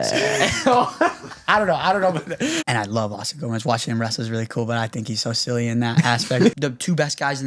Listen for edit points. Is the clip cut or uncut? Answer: cut